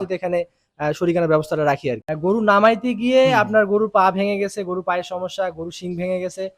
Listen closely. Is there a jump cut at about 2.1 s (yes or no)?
yes